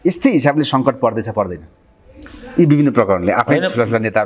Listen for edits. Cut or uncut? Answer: uncut